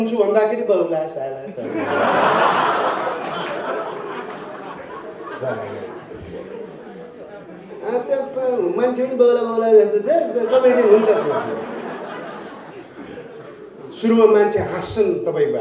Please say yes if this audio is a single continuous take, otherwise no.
yes